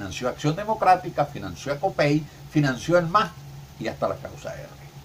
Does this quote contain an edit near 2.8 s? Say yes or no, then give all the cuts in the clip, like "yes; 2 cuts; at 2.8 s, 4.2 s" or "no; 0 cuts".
no; 1 cut; at 1.1 s